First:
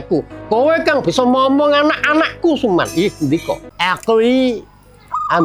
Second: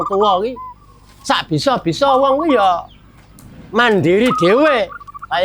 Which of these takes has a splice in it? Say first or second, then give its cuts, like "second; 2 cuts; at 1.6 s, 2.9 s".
first; 1 cut; at 3.7 s